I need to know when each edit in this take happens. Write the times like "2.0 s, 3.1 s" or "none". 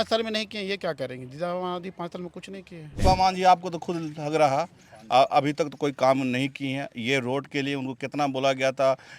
2.9 s